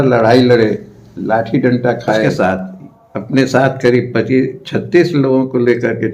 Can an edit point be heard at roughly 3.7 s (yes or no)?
no